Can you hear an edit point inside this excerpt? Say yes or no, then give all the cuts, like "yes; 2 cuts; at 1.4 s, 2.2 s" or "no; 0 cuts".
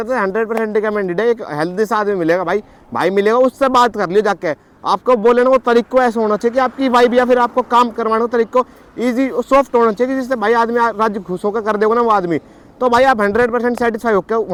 no; 0 cuts